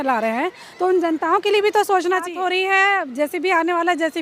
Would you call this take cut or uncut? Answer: cut